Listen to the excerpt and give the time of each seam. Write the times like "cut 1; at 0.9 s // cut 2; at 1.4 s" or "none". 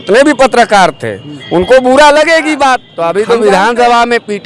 cut 1; at 2.9 s